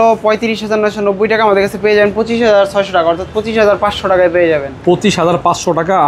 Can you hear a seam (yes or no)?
no